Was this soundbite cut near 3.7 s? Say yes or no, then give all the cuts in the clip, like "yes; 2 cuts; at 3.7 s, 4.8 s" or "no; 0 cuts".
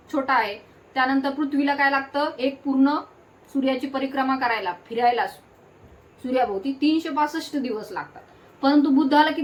no; 0 cuts